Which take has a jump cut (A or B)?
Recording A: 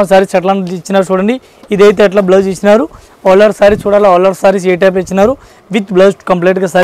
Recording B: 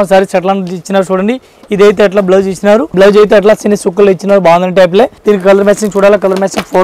B